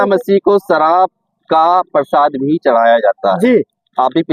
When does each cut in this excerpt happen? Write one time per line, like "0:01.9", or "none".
none